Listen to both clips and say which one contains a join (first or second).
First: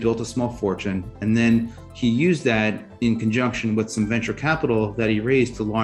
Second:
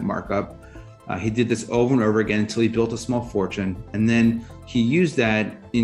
second